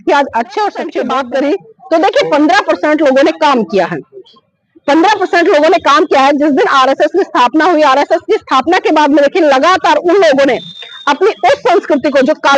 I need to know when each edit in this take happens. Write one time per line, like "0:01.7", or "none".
0:01.0

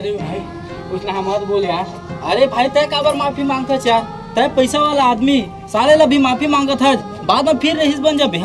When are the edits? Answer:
none

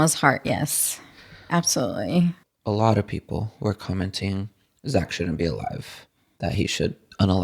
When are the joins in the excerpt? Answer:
0:02.5

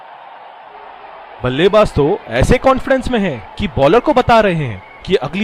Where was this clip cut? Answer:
0:01.4

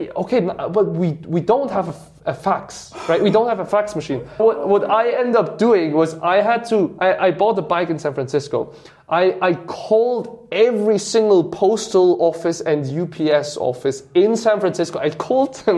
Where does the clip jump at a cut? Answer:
0:04.4

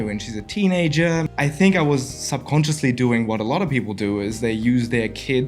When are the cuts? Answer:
0:01.2

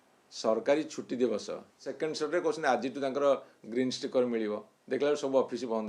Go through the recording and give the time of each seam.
0:01.9

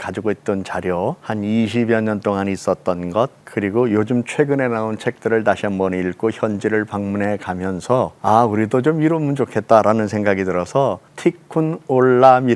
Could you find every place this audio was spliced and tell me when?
0:01.2
0:03.4
0:08.1
0:11.1

